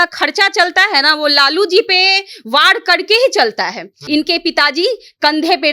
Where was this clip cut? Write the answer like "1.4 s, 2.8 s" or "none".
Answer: 4.0 s